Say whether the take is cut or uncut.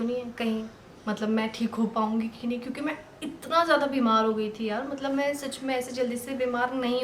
uncut